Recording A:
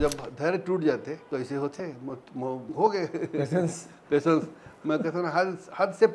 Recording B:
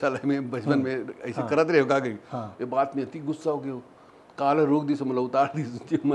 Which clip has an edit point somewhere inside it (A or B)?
A